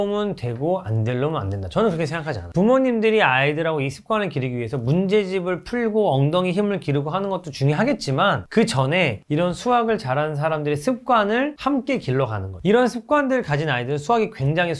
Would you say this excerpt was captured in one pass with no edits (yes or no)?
no